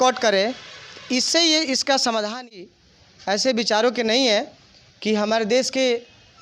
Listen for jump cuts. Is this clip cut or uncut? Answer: cut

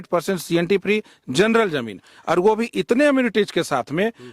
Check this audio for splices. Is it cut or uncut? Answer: uncut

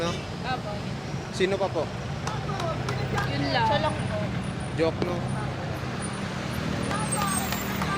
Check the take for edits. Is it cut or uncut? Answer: uncut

